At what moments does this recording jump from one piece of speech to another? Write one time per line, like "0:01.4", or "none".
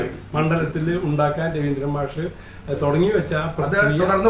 none